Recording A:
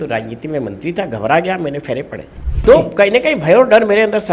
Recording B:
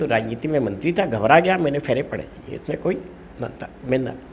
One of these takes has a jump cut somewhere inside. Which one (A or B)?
A